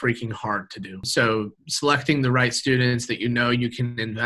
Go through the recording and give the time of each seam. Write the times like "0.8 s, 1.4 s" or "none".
1.1 s